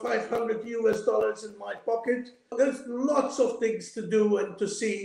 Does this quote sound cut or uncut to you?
cut